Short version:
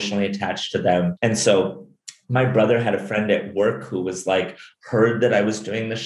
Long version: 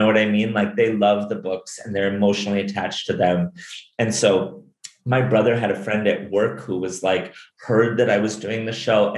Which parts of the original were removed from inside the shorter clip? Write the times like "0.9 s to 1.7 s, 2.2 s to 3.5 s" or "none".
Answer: 3.5 s to 3.9 s